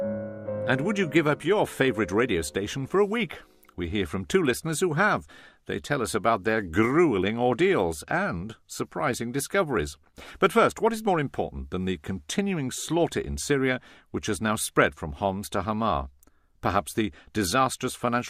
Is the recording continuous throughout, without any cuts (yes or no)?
no